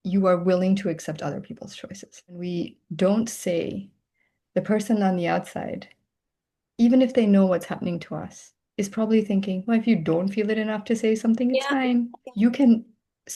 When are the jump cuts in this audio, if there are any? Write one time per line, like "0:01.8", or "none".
0:02.4
0:12.2